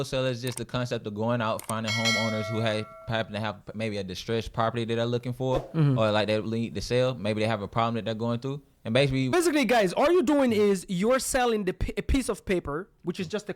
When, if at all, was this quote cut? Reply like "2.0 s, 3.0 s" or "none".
9.3 s